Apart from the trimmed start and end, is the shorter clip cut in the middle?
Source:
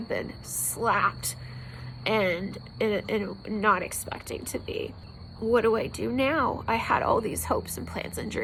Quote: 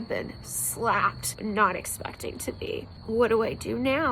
yes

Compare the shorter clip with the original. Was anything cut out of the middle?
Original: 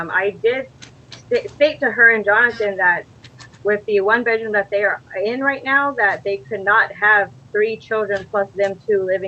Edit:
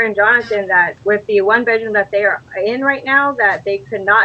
yes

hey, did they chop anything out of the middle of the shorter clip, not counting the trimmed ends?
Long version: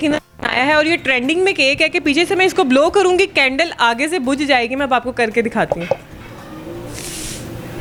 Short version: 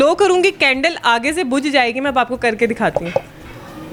no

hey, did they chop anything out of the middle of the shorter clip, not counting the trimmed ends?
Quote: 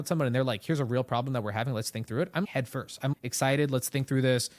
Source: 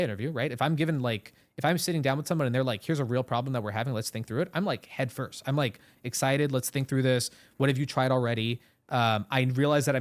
yes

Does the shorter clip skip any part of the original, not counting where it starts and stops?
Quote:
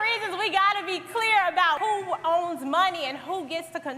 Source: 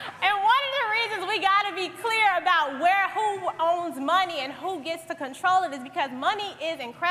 yes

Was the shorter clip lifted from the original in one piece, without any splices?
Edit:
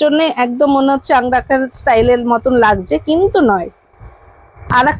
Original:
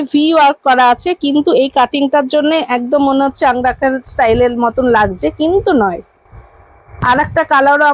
yes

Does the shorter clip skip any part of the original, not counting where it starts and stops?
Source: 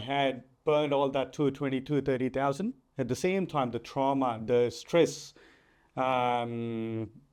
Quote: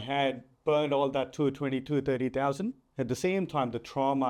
no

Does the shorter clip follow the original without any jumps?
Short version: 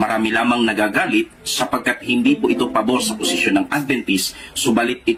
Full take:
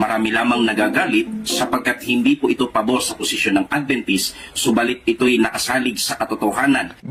yes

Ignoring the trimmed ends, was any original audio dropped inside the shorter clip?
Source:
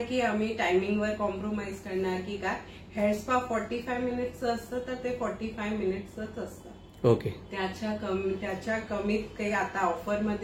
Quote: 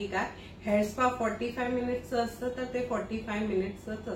no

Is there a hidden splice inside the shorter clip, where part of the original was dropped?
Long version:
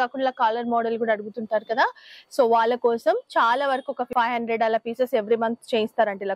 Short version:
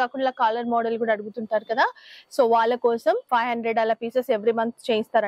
yes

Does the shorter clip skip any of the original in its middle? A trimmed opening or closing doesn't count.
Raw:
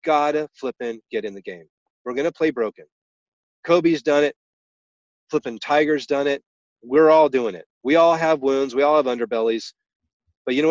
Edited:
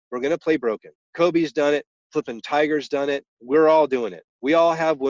yes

